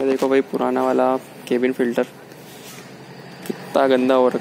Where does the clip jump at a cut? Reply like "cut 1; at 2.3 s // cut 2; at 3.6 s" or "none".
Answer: none

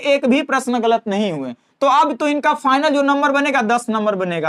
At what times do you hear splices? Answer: none

